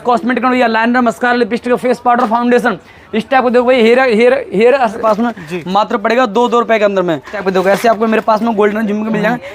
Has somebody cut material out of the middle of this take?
yes; 2 cuts; at 5.0 s, 7.4 s

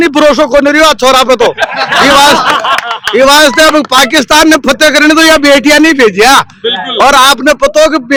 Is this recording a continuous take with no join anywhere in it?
yes; 0 cuts

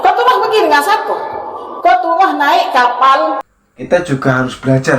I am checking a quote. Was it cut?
yes; 1 cut; at 3.5 s

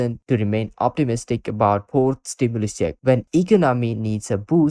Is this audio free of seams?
no; 1 cut; at 3.0 s

